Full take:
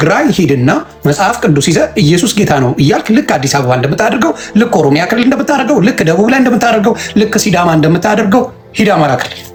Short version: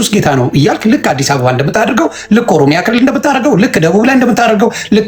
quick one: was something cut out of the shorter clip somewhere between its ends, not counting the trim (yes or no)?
no